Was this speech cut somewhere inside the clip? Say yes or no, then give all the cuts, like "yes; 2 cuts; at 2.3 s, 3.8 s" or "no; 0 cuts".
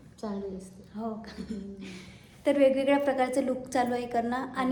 no; 0 cuts